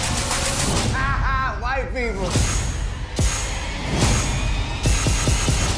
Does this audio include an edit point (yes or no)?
no